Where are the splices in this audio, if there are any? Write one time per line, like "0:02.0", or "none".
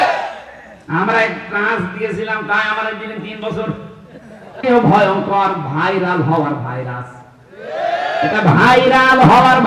0:04.5